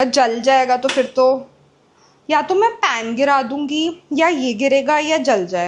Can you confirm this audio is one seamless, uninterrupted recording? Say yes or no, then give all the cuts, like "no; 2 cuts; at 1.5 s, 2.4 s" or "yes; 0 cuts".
yes; 0 cuts